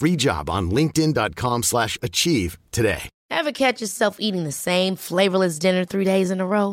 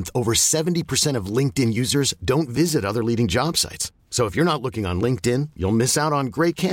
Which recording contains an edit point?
first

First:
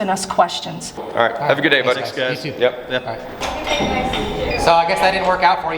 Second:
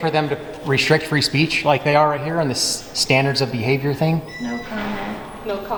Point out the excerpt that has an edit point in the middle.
first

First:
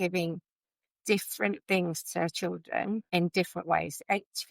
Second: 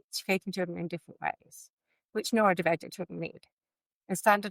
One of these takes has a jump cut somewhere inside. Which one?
first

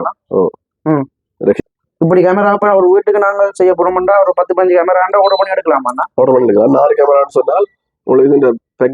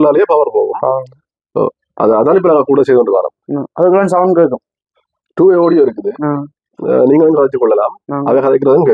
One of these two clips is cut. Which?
first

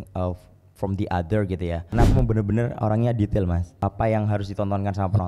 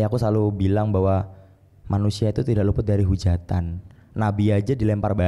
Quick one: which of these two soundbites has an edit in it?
first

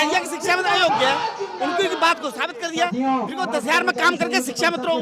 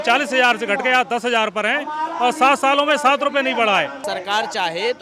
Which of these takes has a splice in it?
second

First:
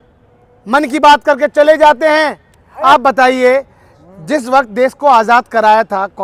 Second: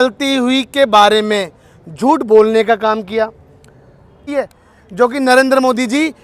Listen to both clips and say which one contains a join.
second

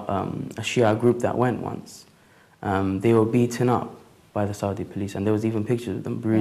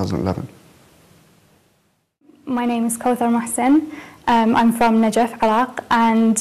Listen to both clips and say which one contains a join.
second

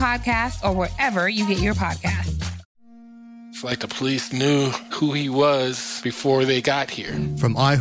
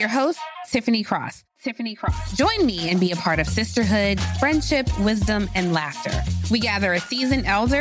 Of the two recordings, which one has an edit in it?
first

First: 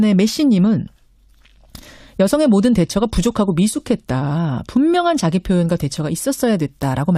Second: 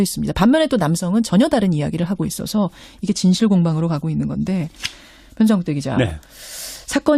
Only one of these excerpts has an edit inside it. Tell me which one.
first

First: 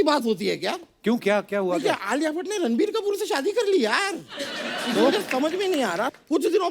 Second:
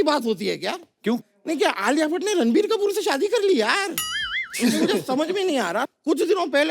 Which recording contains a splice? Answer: second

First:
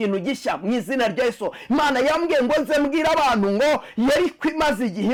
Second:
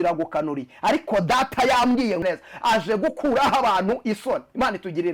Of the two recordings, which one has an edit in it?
second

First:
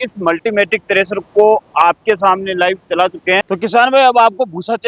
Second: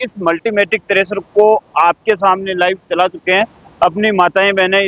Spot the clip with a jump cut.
first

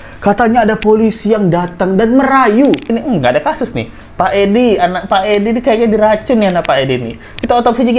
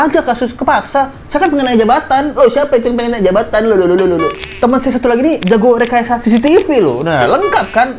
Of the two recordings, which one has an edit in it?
first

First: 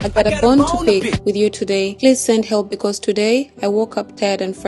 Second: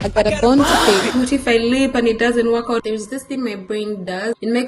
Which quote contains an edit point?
second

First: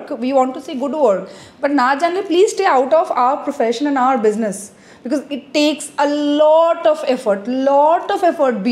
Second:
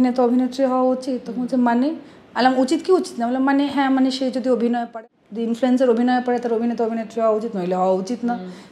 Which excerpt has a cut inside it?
second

